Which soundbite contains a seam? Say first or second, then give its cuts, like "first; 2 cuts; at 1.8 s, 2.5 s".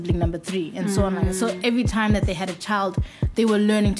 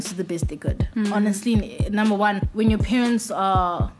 second; 1 cut; at 2.5 s